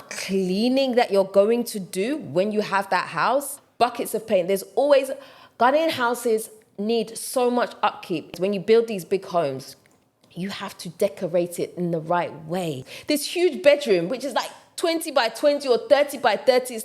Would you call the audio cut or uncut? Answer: cut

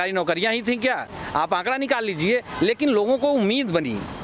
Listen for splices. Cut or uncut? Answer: uncut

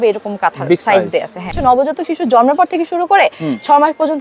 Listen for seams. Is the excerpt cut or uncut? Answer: cut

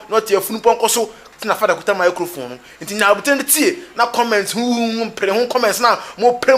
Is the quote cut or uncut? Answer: cut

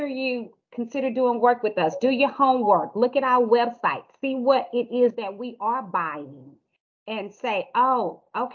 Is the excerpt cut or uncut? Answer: uncut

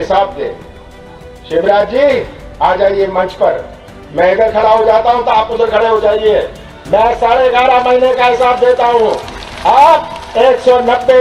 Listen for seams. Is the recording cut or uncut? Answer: uncut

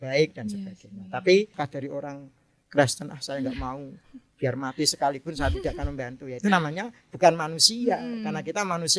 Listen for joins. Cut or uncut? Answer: cut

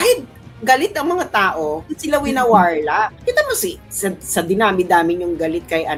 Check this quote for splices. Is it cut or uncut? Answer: uncut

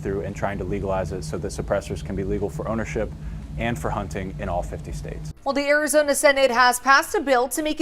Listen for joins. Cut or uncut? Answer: cut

